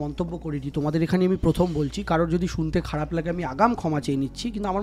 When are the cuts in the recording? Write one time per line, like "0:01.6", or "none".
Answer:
none